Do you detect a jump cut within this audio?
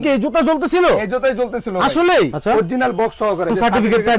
yes; 1 cut; at 2.4 s

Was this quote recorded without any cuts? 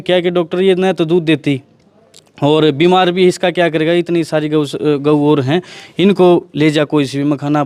yes; 0 cuts

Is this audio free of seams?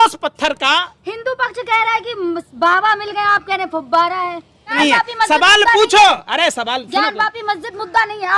no; 1 cut; at 4.7 s

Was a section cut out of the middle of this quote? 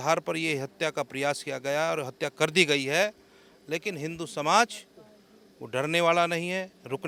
no; 0 cuts

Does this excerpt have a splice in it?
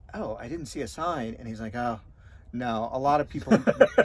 no; 0 cuts

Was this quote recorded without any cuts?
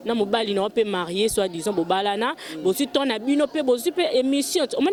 yes; 0 cuts

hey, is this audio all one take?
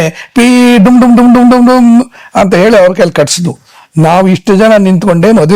yes; 0 cuts

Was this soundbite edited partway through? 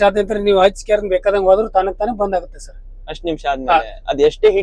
no; 0 cuts

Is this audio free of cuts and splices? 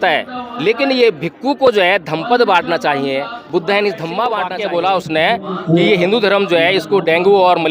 no; 1 cut; at 4.5 s

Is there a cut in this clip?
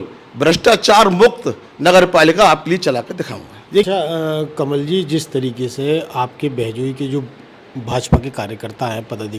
yes; 1 cut; at 3.9 s

